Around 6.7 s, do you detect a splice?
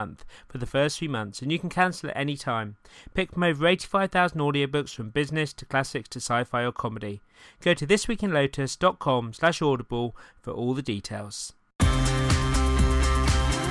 no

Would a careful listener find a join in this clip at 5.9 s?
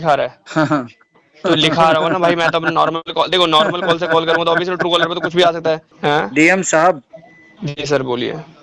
yes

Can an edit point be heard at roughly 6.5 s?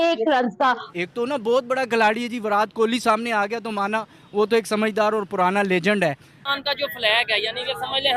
yes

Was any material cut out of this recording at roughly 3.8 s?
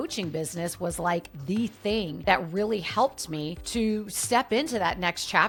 no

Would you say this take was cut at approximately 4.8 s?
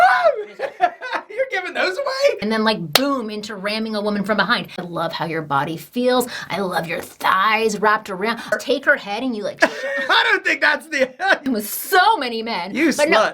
yes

